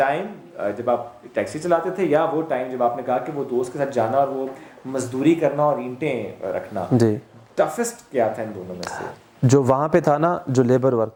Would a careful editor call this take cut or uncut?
uncut